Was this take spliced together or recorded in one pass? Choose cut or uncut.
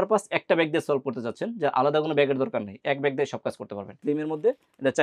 cut